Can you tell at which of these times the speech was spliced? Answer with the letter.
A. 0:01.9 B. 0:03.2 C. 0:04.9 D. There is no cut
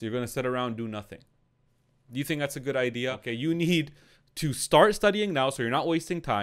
B